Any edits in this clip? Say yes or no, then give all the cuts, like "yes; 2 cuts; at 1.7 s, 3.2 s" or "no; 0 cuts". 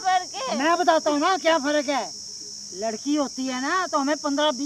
no; 0 cuts